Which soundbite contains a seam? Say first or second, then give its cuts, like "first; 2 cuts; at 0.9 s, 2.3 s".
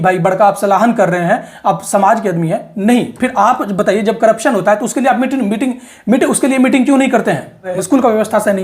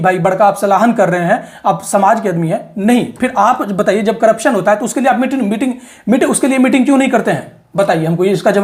first; 1 cut; at 7.7 s